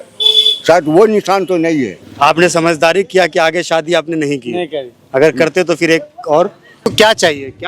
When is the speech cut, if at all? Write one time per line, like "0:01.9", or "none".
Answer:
0:02.0
0:06.8